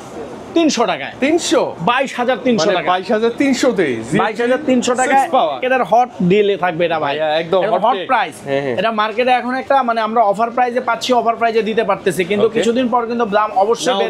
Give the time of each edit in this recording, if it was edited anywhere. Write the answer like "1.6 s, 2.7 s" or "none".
5.6 s